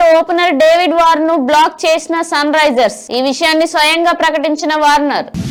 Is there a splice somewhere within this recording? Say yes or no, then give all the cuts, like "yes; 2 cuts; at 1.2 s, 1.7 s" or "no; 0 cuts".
no; 0 cuts